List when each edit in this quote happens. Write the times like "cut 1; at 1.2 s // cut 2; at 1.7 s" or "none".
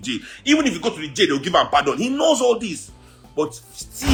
none